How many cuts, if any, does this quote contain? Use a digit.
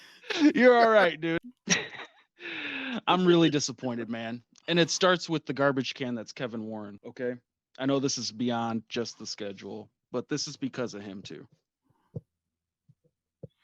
2